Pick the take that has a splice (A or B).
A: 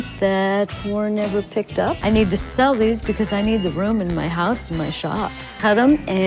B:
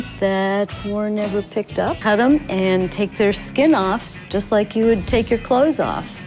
B